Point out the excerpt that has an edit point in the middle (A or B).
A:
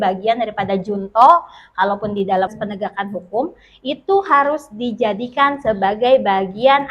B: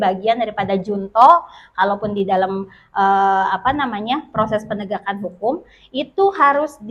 A